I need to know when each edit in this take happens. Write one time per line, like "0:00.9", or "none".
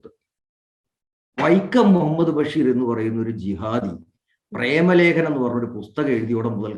none